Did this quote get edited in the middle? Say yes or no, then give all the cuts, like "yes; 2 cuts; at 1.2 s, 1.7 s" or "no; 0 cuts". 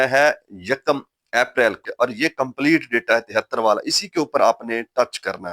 yes; 1 cut; at 1.8 s